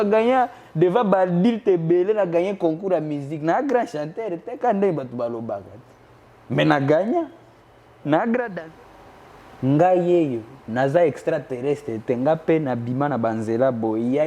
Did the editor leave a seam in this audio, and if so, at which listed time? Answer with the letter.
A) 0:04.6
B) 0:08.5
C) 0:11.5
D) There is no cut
B